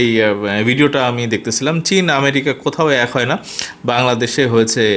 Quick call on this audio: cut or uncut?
uncut